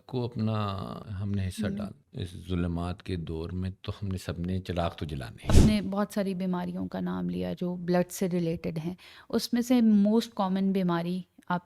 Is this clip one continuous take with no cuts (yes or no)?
no